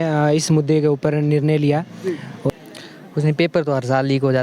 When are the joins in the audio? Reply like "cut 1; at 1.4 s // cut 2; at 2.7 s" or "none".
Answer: cut 1; at 2.5 s